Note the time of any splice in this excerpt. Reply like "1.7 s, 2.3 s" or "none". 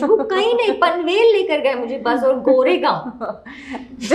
none